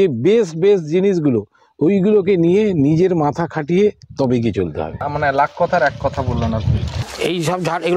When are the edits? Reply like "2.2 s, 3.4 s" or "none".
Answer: 6.9 s